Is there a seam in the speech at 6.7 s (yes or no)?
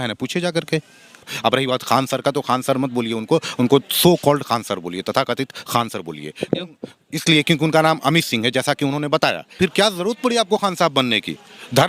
no